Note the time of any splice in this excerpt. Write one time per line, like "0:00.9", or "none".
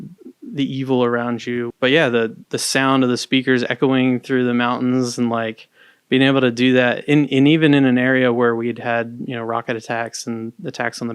0:01.7